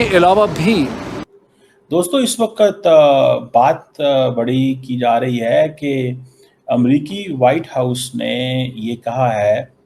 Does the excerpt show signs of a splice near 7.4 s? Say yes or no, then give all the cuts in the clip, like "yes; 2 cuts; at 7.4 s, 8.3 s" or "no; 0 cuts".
no; 1 cut; at 1.1 s